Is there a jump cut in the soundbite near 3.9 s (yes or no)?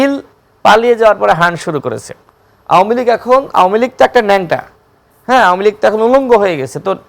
no